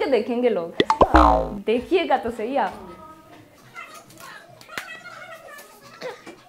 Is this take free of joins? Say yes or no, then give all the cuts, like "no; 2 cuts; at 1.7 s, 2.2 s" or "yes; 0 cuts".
yes; 0 cuts